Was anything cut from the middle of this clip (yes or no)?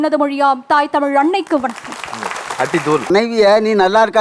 yes